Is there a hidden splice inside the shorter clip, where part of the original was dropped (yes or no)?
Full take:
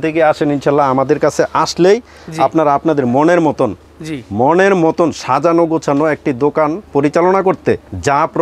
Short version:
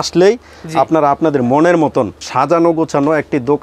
yes